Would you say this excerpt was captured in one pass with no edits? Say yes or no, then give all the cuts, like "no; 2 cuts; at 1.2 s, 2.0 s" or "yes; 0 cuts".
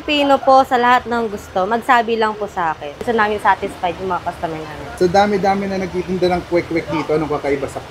no; 2 cuts; at 3.0 s, 4.9 s